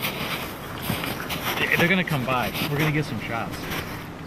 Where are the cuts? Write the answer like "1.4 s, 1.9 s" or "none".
1.2 s